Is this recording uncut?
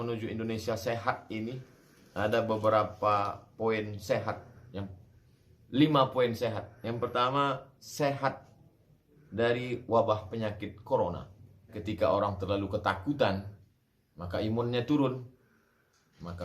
no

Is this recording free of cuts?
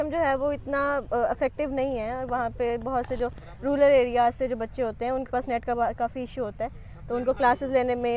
yes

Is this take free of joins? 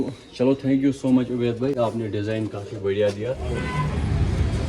no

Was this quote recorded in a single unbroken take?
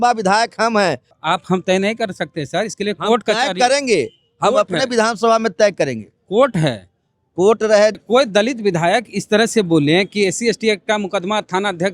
no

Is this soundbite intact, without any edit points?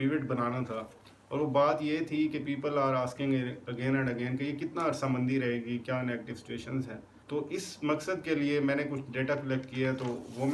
no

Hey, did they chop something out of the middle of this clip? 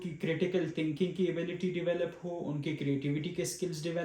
no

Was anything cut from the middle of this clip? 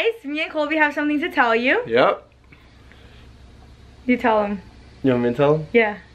no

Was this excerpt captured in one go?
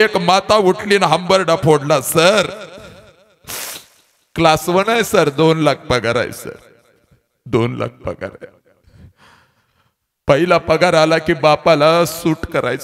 yes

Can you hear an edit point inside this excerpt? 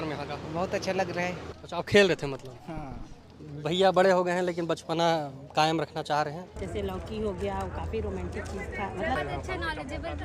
yes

